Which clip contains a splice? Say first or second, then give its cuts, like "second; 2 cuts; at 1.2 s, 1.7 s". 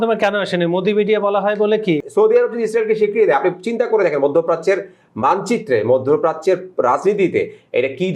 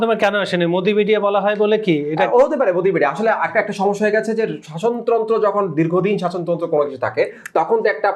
first; 1 cut; at 2.0 s